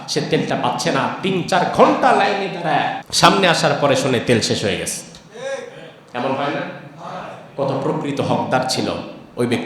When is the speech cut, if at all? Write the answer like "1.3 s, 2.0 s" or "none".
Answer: 3.0 s